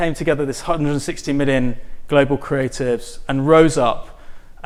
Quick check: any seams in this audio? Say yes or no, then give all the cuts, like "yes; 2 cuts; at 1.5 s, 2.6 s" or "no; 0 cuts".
no; 0 cuts